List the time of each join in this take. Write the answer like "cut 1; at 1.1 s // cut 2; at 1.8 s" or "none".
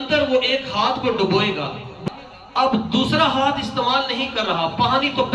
cut 1; at 2.0 s